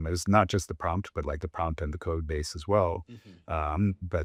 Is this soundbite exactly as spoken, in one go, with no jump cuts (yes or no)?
yes